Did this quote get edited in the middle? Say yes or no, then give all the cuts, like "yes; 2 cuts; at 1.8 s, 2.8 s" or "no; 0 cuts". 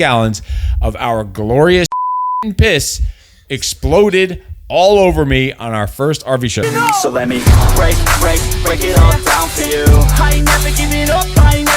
yes; 1 cut; at 6.6 s